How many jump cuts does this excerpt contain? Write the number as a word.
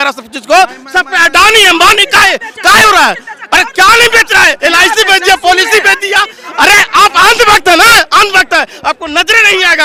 zero